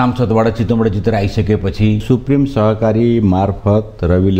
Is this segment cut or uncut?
cut